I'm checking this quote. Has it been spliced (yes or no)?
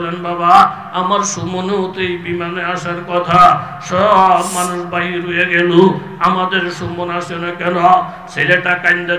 no